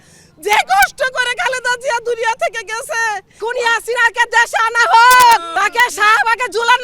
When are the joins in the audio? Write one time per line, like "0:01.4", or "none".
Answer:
0:03.4
0:05.5